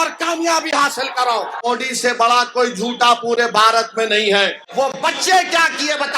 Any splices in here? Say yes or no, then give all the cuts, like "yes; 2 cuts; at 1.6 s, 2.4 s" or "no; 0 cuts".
yes; 2 cuts; at 1.6 s, 4.6 s